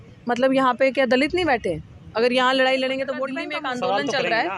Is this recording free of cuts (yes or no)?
no